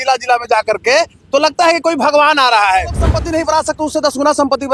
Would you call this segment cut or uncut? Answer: cut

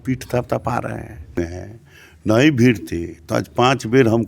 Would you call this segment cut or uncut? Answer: cut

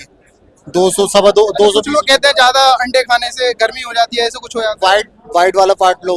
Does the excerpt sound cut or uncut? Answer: uncut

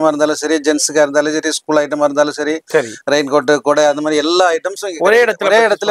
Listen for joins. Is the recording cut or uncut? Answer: uncut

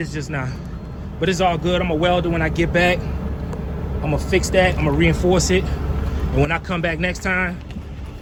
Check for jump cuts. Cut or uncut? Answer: uncut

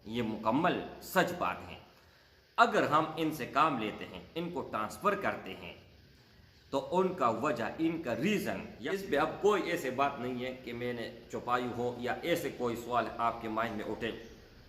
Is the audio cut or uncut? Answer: cut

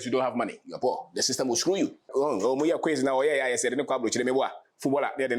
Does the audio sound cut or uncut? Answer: cut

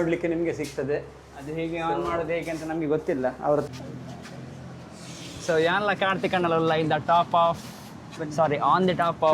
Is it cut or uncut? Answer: cut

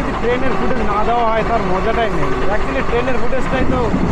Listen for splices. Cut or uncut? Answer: uncut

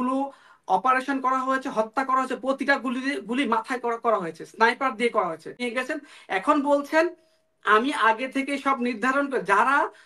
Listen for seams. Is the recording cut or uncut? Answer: cut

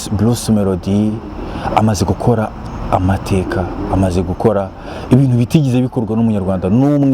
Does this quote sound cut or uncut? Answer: uncut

